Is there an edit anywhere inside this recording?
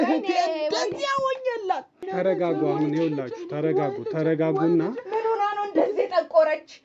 yes; 1 cut; at 2.0 s

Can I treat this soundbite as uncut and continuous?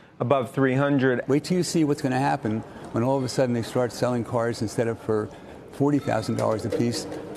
no; 1 cut; at 1.2 s

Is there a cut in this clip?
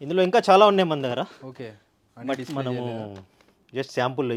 no; 0 cuts

